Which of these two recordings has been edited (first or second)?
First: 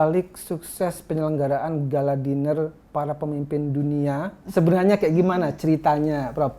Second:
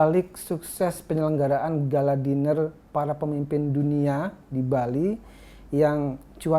first